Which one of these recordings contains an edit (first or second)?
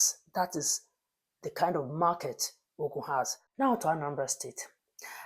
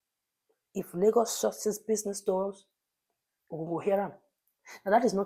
first